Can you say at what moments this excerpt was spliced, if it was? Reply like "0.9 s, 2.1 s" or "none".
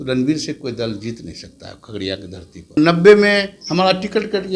2.8 s